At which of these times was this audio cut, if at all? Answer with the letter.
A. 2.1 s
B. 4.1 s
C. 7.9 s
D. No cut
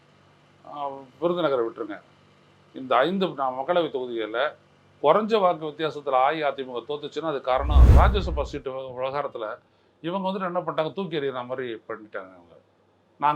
C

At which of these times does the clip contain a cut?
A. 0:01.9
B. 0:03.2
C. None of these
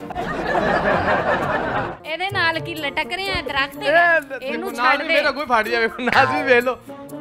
A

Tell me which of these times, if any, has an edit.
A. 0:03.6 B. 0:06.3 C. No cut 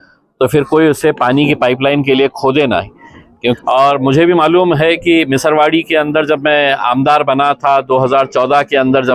A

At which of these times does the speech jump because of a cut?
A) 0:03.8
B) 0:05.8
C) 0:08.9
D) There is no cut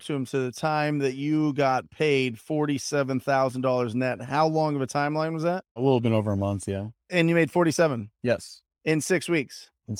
B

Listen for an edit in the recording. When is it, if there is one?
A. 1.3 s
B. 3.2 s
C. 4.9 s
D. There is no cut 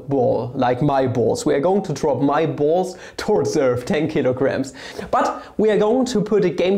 C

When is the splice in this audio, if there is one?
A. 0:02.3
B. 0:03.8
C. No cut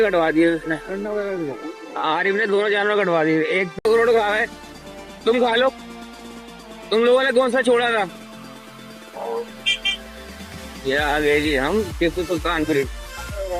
B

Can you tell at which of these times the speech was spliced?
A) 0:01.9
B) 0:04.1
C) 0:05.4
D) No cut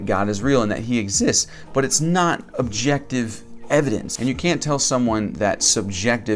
B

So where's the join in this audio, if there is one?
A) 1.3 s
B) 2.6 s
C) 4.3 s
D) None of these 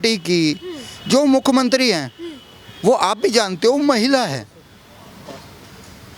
D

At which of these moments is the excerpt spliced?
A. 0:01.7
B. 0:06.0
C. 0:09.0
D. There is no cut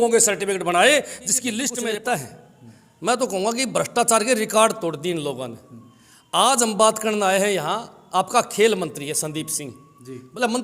A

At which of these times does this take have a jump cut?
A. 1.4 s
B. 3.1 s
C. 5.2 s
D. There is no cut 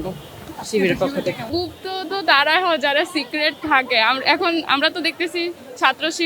A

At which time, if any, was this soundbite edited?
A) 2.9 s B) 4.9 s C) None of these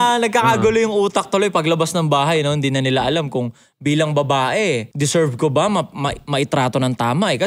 B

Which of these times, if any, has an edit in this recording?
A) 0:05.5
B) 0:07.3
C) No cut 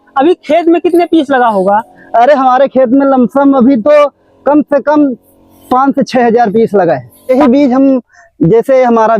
B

